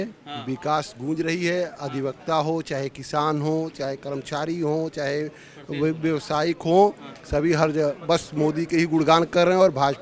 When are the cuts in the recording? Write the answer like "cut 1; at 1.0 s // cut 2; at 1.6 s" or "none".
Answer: none